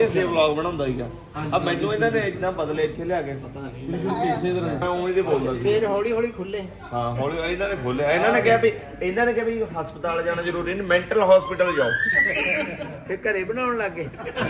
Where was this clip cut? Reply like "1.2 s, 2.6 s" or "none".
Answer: 4.8 s